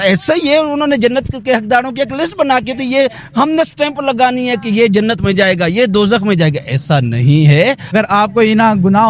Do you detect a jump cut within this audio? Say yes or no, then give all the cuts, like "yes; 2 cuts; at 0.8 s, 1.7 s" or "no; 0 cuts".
yes; 1 cut; at 7.9 s